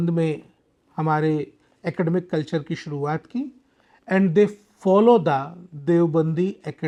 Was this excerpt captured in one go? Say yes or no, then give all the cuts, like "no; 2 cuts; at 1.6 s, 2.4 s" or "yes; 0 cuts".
yes; 0 cuts